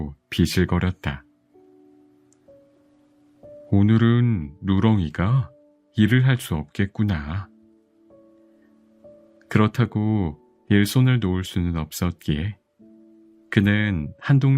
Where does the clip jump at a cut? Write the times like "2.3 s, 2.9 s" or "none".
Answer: 1.2 s, 3.1 s